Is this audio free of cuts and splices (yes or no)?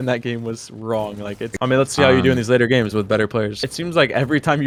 yes